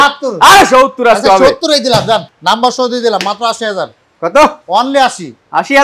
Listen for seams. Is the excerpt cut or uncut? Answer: cut